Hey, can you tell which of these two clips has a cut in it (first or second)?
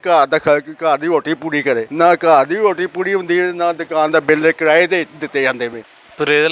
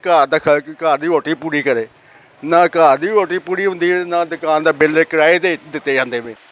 first